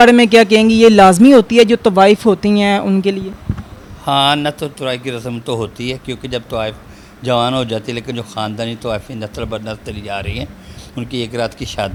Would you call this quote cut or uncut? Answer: uncut